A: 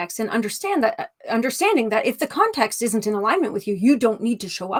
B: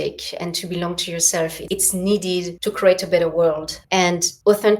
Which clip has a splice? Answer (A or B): B